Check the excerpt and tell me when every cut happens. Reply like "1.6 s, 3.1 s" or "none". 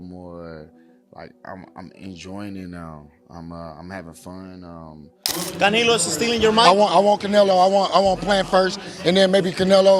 5.2 s